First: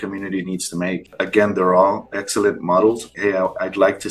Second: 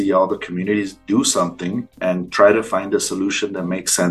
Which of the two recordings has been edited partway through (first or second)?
first